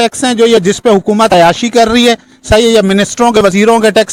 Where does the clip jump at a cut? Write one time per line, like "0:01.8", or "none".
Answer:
none